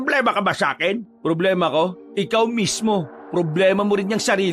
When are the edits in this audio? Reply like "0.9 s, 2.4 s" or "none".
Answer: 1.1 s, 2.0 s, 3.2 s